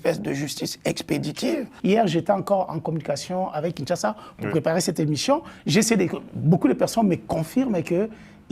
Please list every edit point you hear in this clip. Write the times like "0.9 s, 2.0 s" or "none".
1.7 s